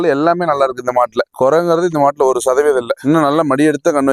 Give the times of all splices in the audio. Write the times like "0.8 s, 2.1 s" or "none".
3.0 s